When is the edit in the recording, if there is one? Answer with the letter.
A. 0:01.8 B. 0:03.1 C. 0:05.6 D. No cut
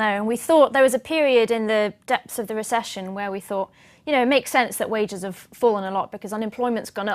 B